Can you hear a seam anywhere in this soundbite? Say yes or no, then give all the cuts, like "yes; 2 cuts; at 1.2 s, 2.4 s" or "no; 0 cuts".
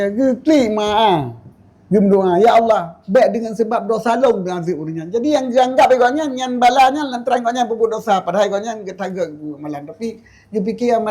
no; 0 cuts